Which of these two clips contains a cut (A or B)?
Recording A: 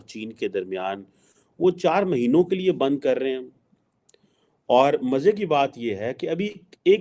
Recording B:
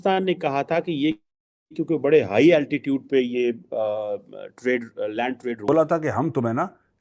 B